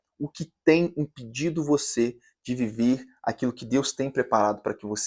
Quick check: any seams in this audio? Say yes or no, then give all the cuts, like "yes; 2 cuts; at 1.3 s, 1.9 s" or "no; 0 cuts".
no; 0 cuts